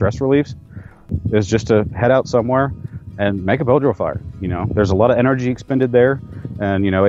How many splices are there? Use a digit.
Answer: 1